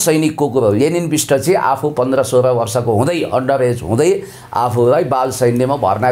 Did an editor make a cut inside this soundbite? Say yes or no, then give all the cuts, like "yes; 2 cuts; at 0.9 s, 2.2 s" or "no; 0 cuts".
no; 0 cuts